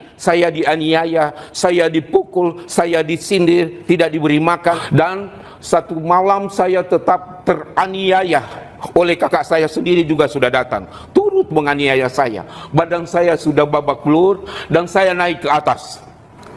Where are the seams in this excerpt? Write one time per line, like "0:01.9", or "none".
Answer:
0:04.8